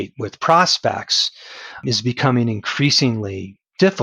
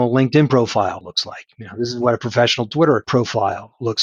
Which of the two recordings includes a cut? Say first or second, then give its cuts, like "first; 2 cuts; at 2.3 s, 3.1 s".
second; 2 cuts; at 1.0 s, 3.1 s